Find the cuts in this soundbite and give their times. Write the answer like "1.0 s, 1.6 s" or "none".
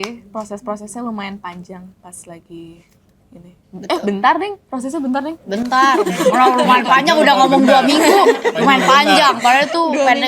none